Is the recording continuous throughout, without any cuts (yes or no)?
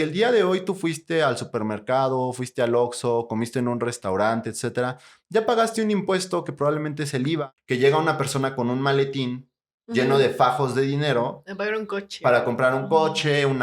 no